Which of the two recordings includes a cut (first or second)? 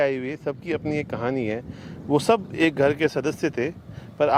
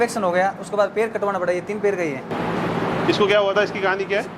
second